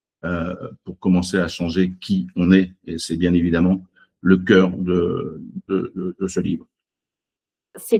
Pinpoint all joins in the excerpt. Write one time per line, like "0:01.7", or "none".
none